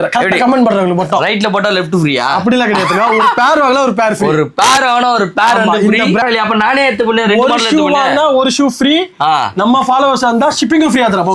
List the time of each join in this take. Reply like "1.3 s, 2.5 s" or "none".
6.2 s